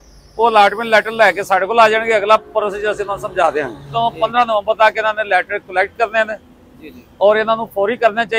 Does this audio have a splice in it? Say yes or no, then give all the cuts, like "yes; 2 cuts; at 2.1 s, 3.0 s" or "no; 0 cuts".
yes; 1 cut; at 3.9 s